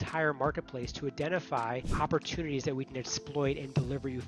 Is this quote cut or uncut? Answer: cut